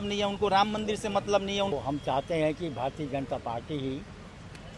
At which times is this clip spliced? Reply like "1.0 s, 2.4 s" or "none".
1.7 s